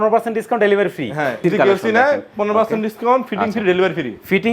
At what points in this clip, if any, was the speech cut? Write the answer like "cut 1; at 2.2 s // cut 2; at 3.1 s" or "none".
cut 1; at 1.4 s